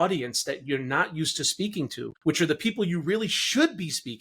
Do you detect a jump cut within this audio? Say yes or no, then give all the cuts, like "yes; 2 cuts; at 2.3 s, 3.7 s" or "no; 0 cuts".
yes; 1 cut; at 2.1 s